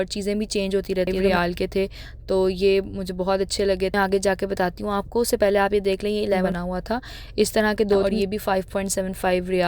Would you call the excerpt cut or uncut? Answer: cut